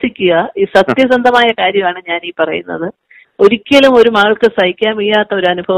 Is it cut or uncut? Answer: uncut